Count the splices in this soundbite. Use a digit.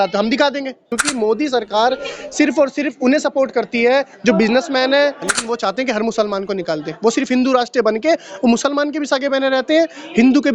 2